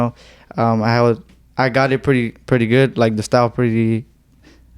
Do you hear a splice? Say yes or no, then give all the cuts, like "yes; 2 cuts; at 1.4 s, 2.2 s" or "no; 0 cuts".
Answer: no; 0 cuts